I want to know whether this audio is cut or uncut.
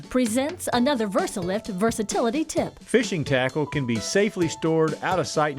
cut